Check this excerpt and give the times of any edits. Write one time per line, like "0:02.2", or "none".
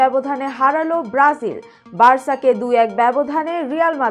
none